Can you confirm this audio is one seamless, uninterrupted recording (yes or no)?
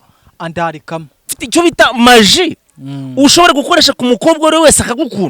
no